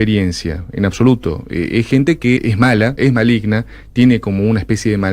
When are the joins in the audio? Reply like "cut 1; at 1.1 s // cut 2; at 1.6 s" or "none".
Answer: cut 1; at 2.9 s